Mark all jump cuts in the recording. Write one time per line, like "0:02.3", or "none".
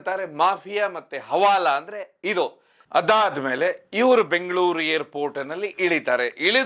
none